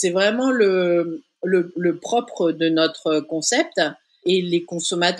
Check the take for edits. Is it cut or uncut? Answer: cut